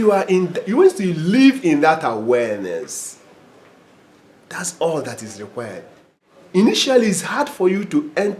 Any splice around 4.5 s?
no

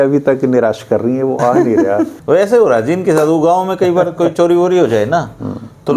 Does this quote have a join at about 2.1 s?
yes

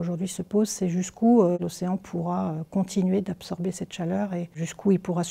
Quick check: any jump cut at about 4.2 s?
no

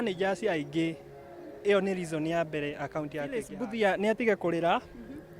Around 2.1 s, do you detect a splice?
no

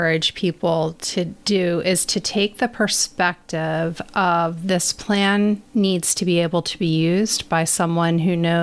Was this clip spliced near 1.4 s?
yes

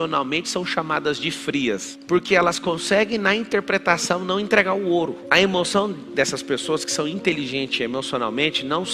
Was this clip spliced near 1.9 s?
yes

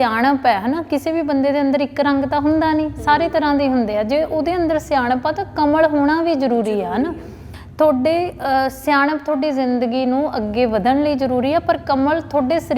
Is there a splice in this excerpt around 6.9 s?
no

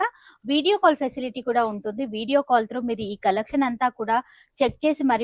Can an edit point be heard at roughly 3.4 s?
no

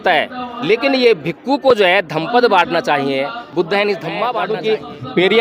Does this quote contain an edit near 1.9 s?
no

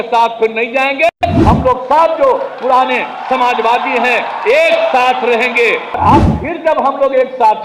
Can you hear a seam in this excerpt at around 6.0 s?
yes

